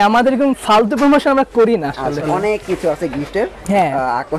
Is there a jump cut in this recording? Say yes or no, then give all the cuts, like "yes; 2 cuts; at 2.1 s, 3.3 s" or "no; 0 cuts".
yes; 1 cut; at 2.2 s